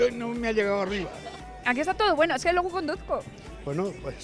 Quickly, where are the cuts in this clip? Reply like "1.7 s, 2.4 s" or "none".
1.7 s